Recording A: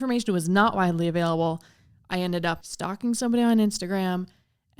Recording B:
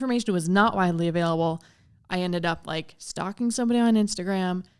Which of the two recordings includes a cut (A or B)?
A